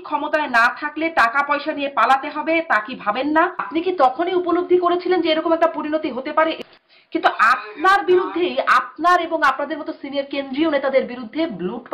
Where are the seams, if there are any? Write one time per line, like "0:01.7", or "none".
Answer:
0:03.7
0:06.6